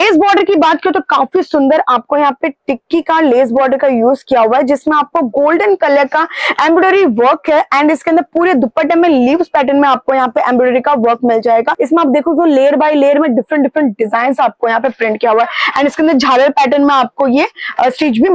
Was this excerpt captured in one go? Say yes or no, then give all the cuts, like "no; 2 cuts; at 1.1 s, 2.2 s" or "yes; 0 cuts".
no; 1 cut; at 11.8 s